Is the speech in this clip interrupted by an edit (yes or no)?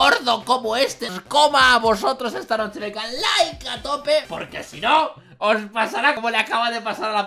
yes